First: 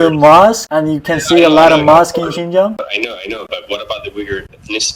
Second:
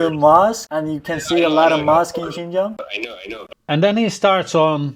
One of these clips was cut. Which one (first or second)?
first